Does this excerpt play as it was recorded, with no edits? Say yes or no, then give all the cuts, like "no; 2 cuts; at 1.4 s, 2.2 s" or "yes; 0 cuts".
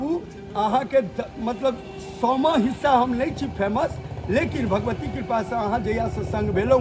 yes; 0 cuts